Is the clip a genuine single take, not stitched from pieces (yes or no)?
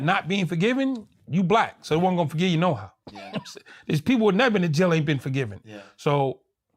yes